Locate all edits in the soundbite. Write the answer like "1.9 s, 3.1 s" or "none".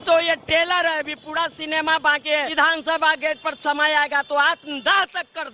2.5 s